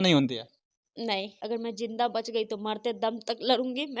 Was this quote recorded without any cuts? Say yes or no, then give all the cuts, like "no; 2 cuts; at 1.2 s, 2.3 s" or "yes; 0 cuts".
no; 1 cut; at 1.0 s